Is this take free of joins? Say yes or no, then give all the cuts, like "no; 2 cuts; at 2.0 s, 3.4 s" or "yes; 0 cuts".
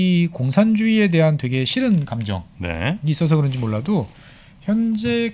yes; 0 cuts